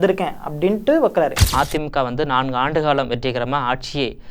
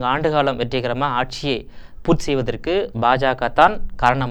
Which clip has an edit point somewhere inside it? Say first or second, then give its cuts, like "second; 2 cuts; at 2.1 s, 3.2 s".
first; 1 cut; at 1.4 s